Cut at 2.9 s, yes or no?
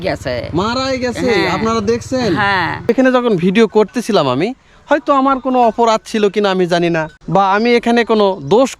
yes